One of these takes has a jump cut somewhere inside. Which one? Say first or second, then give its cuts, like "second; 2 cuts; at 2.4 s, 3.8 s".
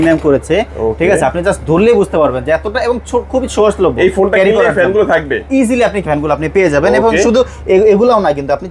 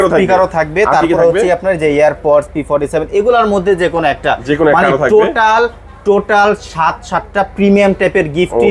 first; 1 cut; at 6.0 s